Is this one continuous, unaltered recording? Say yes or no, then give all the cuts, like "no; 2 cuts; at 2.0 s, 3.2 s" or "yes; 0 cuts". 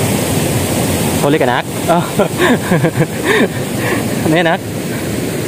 yes; 0 cuts